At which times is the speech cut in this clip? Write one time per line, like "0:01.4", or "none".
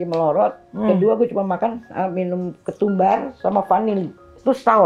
none